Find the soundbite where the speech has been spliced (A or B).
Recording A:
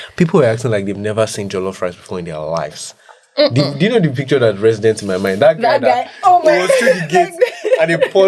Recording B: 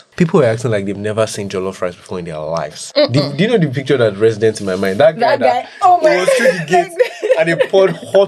B